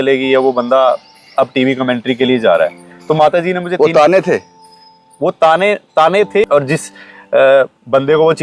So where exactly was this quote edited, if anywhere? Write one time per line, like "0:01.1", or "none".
0:06.4